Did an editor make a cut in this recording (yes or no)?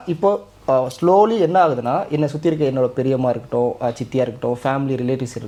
no